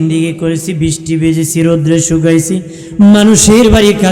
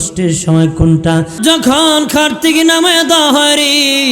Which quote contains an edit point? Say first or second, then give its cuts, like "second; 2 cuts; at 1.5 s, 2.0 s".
second; 1 cut; at 1.3 s